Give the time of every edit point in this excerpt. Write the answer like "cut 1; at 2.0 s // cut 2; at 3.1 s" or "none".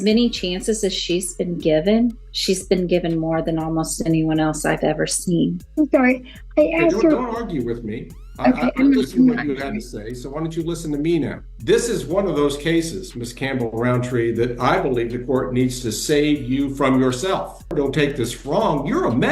cut 1; at 2.3 s // cut 2; at 5.6 s // cut 3; at 11.5 s // cut 4; at 17.7 s